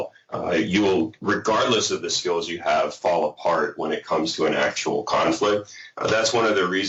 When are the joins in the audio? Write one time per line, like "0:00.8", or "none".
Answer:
none